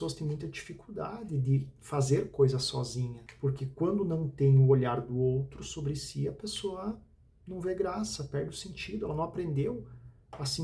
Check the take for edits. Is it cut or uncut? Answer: uncut